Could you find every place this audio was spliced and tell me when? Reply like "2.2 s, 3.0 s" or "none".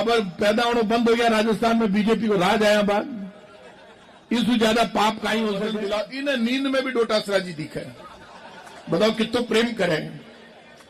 5.7 s